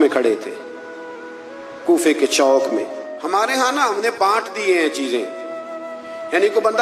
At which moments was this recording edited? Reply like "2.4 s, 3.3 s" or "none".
3.0 s

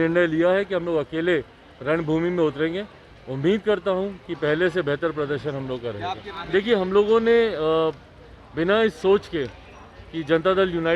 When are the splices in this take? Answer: 6.3 s

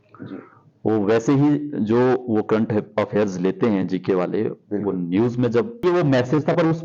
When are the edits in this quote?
5.8 s

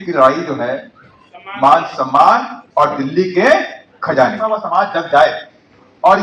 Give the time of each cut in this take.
4.5 s

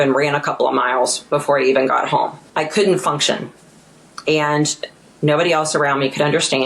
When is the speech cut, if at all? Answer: 2.4 s

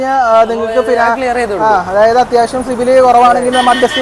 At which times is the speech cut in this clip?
none

